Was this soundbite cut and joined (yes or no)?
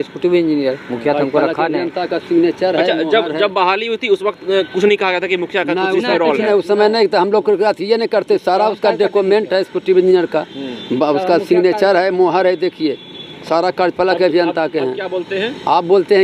no